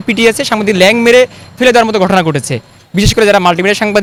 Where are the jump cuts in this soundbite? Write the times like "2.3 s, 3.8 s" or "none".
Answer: none